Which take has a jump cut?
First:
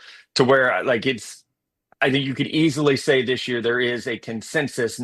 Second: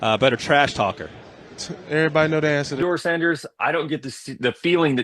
second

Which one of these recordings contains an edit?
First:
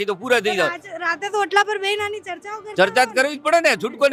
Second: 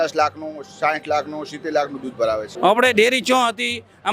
second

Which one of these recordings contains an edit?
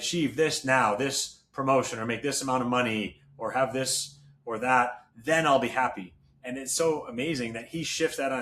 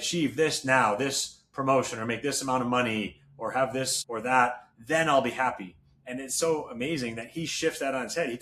second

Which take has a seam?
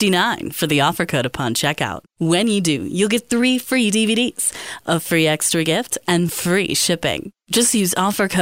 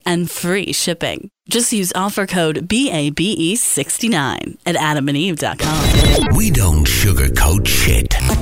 second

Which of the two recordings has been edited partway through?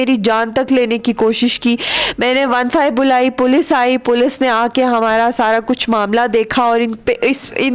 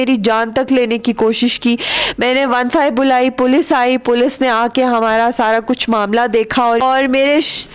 second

